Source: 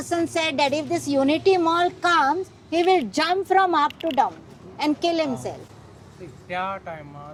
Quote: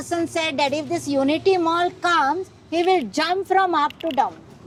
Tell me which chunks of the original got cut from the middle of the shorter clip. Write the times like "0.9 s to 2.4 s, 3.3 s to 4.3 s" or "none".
none